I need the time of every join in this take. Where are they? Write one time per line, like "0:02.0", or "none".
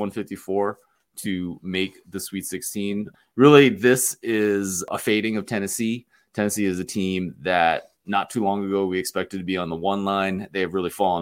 0:03.1
0:04.9